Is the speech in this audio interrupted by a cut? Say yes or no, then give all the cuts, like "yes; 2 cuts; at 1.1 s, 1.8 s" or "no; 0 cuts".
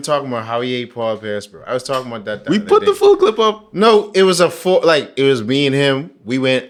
no; 0 cuts